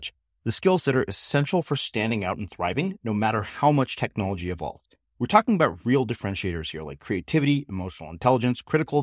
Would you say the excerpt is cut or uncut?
uncut